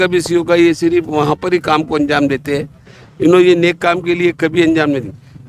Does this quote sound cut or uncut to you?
uncut